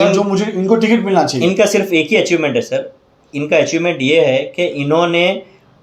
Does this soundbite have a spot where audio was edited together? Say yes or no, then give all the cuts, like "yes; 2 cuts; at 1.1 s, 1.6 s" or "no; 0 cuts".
no; 0 cuts